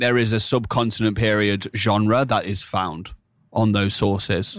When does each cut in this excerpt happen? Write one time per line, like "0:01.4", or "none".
none

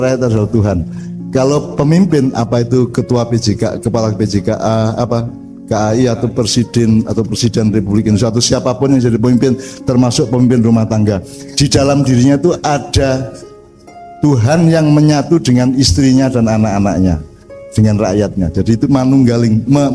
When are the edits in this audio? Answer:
none

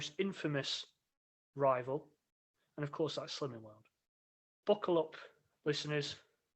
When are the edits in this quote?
0:04.5

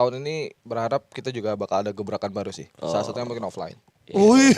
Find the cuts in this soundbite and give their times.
none

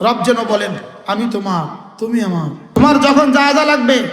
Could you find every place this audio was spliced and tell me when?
0:02.7

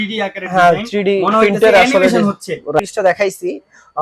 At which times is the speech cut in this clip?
0:02.8

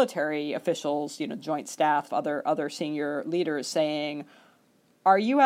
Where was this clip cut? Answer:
0:02.1

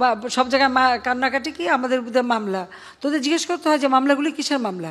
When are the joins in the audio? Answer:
none

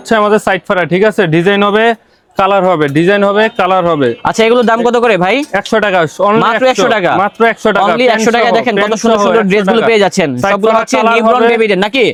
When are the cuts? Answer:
none

